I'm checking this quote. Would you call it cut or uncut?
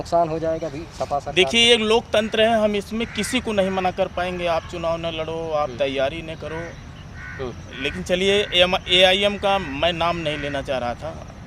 uncut